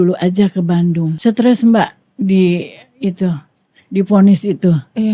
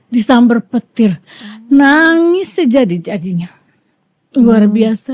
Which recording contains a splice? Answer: first; 1 cut; at 1.1 s

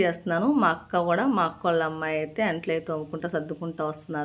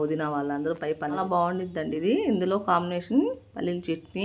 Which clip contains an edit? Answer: second; 1 cut; at 1.2 s

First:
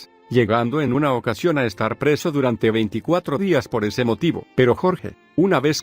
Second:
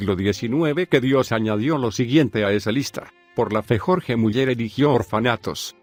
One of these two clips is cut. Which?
first; 1 cut; at 1.2 s

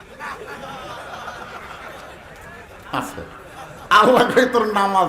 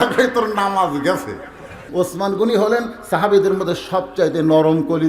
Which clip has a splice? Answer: second; 1 cut; at 1.9 s

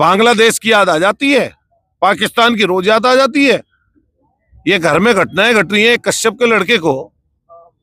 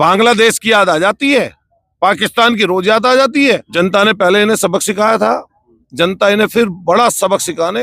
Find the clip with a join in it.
second; 1 cut; at 3.7 s

